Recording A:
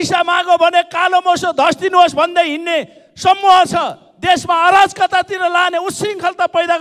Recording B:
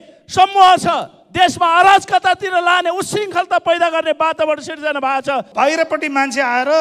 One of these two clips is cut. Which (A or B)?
B